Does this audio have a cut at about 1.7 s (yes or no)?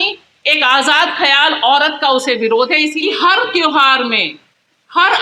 no